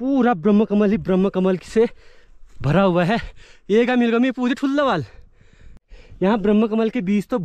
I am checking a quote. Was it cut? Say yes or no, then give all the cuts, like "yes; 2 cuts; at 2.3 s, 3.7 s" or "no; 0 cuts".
yes; 1 cut; at 5.7 s